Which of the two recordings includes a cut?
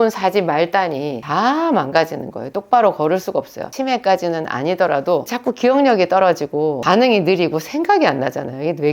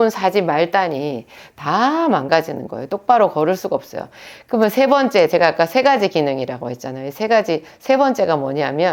first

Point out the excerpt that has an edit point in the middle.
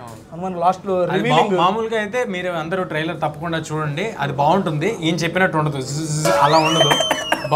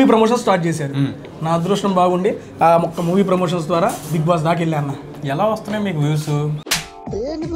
second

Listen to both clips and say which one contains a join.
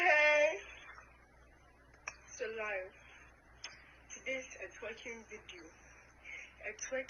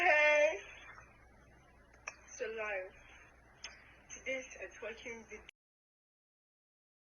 first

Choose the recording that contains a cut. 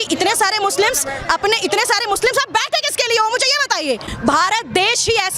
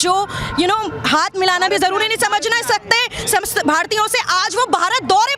first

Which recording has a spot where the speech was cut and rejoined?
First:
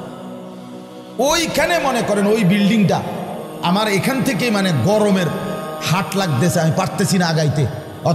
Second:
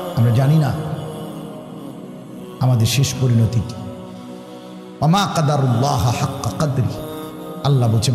second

